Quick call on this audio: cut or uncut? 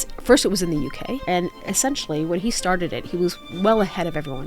cut